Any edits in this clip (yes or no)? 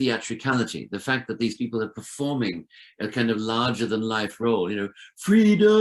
no